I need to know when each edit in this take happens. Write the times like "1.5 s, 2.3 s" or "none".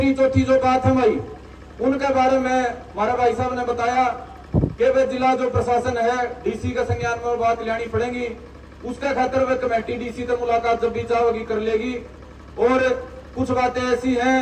none